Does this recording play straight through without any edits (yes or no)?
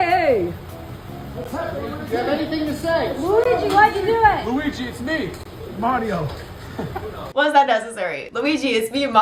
yes